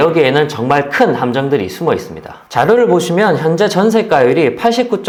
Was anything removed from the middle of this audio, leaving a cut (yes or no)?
no